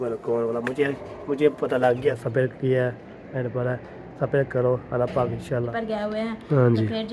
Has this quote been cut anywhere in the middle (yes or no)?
yes